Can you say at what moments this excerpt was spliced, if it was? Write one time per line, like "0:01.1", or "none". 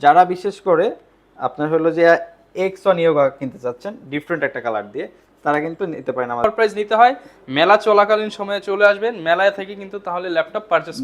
0:06.4

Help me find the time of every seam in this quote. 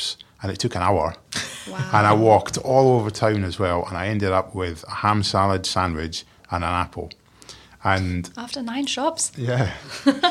none

